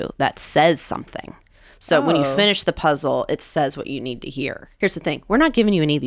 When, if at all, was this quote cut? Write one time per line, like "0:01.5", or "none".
0:04.6